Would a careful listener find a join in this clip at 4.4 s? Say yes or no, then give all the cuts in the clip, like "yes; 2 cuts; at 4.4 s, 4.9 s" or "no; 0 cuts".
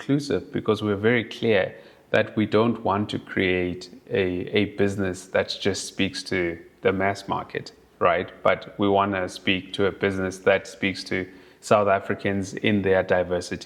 no; 0 cuts